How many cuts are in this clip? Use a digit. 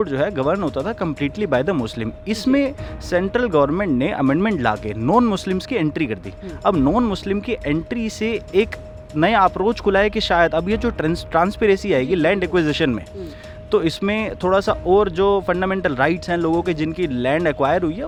0